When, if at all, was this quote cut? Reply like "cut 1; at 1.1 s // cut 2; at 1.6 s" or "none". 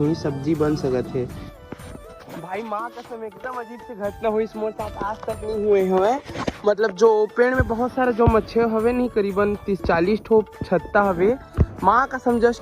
cut 1; at 1.6 s